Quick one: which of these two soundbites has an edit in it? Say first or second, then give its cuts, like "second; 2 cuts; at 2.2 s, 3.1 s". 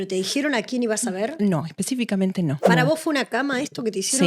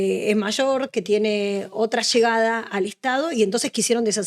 first; 1 cut; at 2.6 s